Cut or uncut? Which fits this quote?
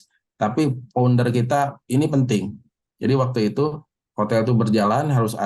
uncut